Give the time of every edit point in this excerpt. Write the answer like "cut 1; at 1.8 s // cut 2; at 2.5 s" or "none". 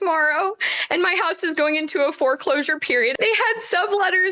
cut 1; at 3.1 s